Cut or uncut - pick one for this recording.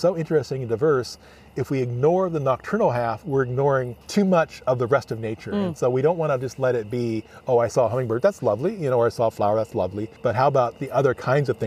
cut